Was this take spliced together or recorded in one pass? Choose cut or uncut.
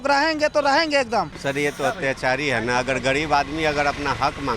cut